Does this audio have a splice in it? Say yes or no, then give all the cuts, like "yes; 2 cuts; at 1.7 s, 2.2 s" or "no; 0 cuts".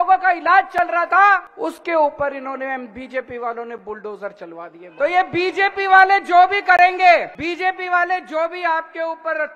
yes; 3 cuts; at 1.5 s, 4.8 s, 7.3 s